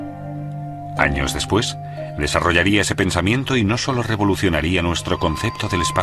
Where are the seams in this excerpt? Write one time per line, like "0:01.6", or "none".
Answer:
0:03.0